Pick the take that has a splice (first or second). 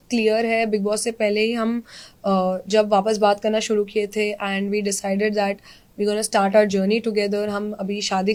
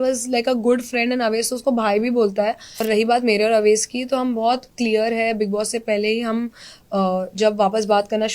second